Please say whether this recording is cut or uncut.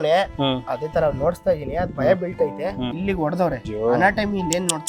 cut